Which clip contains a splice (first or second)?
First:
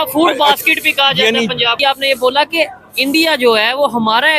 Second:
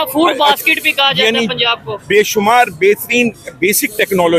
first